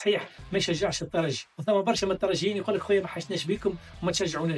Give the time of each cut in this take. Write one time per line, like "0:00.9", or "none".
0:01.4